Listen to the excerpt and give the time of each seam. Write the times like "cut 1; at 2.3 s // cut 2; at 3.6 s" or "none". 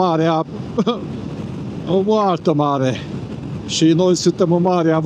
none

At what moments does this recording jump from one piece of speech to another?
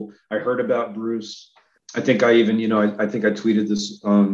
cut 1; at 1.8 s

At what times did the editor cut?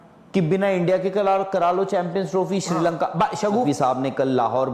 cut 1; at 3.6 s

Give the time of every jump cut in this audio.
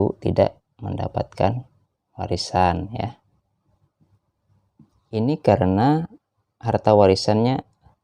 cut 1; at 5.2 s

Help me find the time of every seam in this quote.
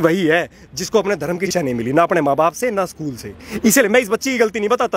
cut 1; at 1.5 s

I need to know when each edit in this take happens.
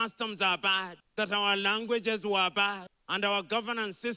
cut 1; at 1.0 s // cut 2; at 2.9 s

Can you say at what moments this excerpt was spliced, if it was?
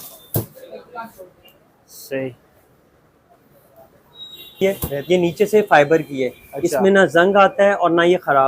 cut 1; at 4.6 s

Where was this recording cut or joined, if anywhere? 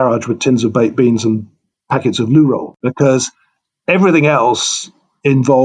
cut 1; at 2.7 s

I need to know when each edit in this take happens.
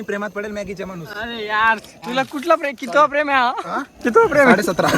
cut 1; at 1.1 s // cut 2; at 1.9 s

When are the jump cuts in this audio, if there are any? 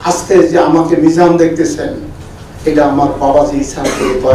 none

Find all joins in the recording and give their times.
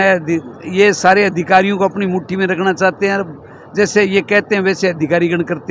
none

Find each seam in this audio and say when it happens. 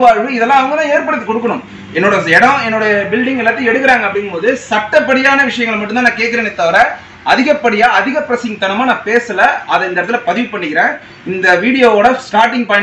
none

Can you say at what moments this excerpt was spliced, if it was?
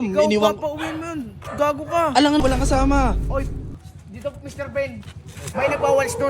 cut 1; at 2.4 s

